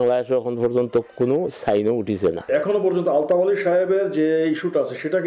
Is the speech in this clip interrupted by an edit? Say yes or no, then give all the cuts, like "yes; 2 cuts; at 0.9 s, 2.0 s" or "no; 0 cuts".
yes; 1 cut; at 2.4 s